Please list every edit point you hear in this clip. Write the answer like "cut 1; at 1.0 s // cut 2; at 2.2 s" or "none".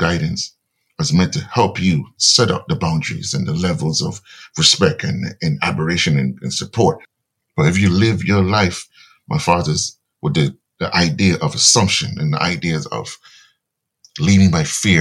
cut 1; at 7.1 s